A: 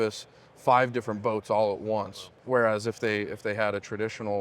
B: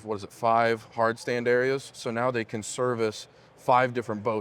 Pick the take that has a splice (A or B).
A